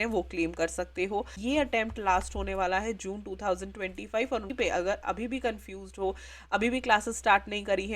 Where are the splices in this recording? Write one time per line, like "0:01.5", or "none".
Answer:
0:01.4
0:04.5